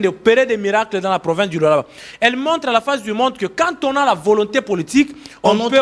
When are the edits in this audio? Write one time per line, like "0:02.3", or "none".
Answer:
none

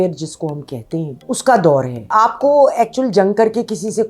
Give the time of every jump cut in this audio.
0:01.3
0:02.1

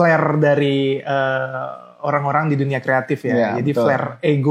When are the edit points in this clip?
none

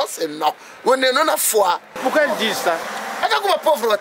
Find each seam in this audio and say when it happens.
0:01.9
0:02.9

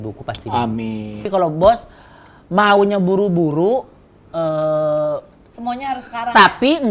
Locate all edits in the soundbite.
0:01.3

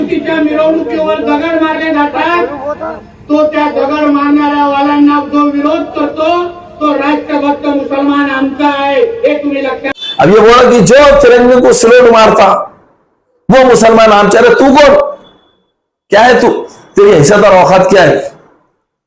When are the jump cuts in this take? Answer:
0:09.9

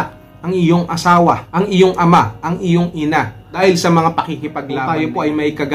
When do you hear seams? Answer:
0:04.7

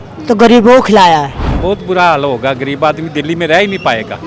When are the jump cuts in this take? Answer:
0:01.5

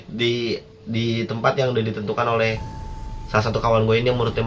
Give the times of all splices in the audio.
none

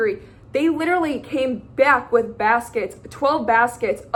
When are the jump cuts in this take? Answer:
none

